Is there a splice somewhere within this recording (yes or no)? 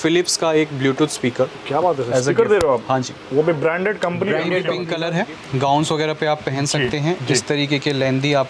yes